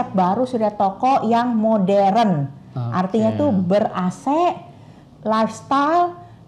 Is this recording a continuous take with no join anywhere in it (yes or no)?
yes